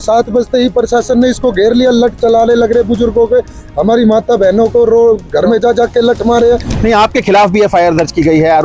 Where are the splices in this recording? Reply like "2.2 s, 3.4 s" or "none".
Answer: 6.8 s

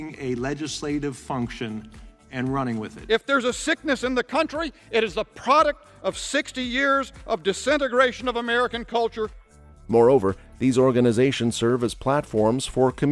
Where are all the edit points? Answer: none

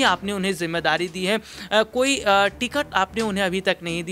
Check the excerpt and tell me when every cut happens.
none

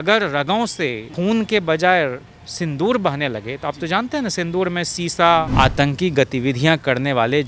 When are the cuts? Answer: 1.0 s, 5.5 s

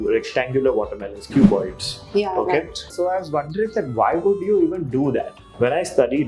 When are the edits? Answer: 2.9 s, 5.4 s

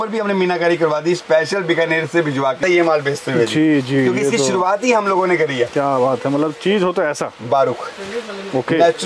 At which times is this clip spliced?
2.6 s

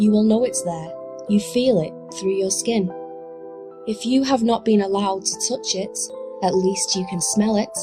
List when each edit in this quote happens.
3.7 s

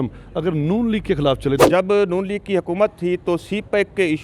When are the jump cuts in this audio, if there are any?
1.6 s

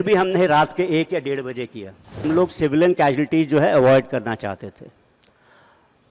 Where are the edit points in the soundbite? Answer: 2.2 s

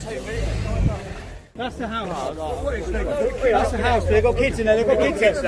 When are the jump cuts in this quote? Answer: none

